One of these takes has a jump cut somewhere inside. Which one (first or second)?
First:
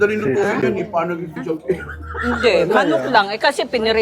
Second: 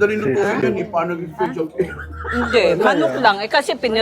first